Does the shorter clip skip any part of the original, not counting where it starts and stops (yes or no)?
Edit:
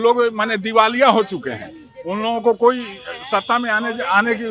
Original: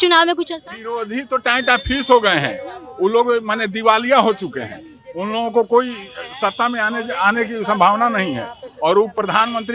no